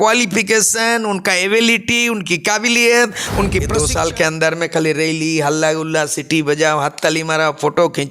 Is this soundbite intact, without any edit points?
no; 1 cut; at 3.8 s

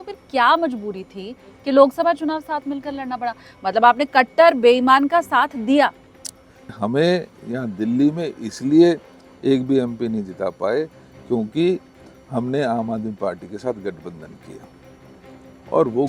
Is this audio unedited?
no; 1 cut; at 6.8 s

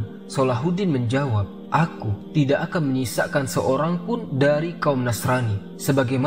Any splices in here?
yes; 1 cut; at 1.5 s

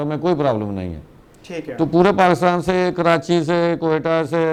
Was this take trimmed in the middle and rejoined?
no; 0 cuts

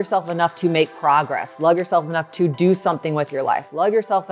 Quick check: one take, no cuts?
yes; 0 cuts

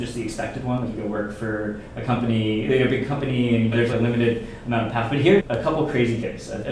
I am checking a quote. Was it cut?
yes; 1 cut; at 5.4 s

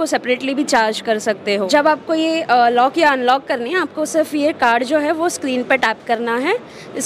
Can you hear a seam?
yes; 1 cut; at 1.7 s

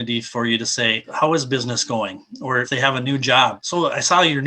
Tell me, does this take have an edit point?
yes; 3 cuts; at 1.1 s, 2.7 s, 3.6 s

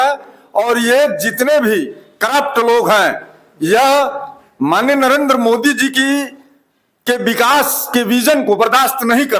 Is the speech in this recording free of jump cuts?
yes; 0 cuts

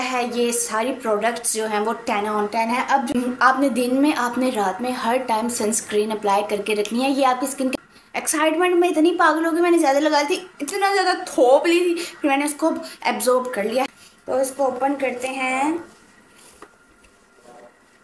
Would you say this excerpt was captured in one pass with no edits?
no; 3 cuts; at 3.1 s, 7.7 s, 13.9 s

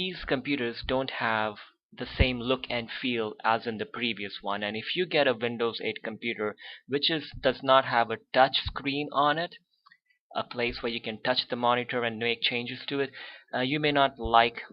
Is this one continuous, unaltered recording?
no; 1 cut; at 9.5 s

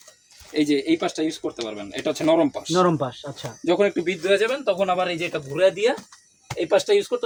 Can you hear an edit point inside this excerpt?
no; 0 cuts

